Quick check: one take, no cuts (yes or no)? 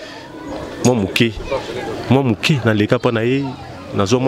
yes